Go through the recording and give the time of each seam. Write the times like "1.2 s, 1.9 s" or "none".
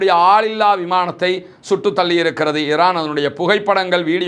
none